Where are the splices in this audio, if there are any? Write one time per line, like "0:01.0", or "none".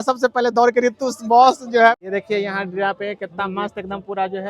0:02.0